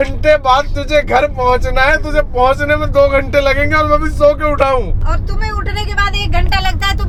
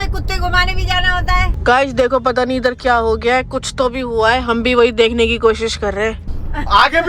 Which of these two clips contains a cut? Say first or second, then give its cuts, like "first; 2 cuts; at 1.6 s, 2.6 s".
second; 2 cuts; at 1.5 s, 6.2 s